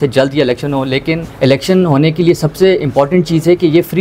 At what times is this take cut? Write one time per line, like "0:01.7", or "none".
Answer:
0:01.3